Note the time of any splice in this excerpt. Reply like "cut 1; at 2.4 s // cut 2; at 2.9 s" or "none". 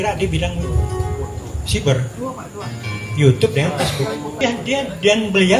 none

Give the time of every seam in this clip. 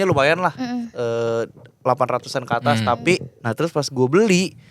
cut 1; at 3.3 s

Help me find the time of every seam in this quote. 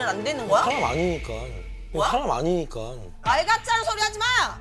none

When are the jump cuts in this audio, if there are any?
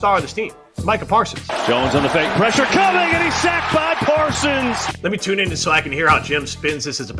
cut 1; at 1.2 s

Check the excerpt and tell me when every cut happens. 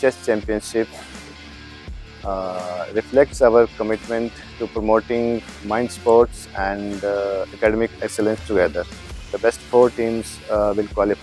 cut 1; at 9.3 s

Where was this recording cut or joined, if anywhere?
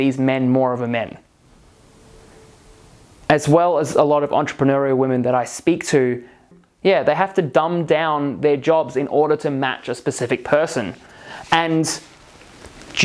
cut 1; at 6.5 s

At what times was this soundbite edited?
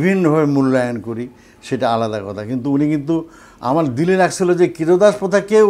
none

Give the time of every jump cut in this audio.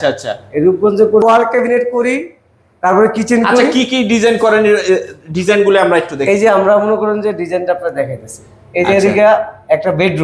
cut 1; at 1.2 s

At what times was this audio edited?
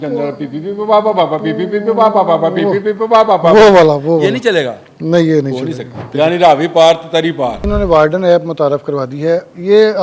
cut 1; at 6.0 s // cut 2; at 7.7 s

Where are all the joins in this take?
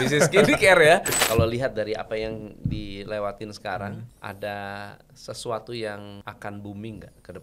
cut 1; at 1.2 s // cut 2; at 4.1 s // cut 3; at 6.2 s

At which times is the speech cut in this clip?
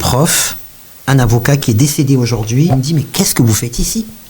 cut 1; at 2.7 s

